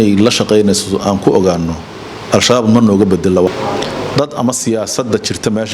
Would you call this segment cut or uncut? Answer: cut